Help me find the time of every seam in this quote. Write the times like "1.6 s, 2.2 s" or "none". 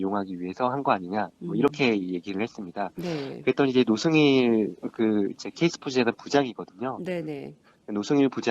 5.4 s